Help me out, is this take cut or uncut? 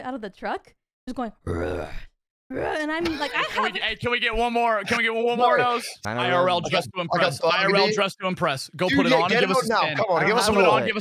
cut